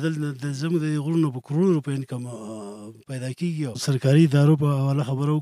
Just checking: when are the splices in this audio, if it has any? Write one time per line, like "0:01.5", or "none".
0:03.8